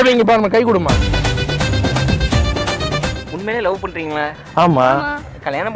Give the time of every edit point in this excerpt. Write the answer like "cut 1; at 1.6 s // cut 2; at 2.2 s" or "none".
cut 1; at 3.3 s